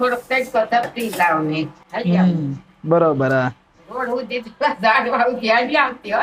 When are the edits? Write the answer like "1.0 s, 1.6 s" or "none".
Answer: none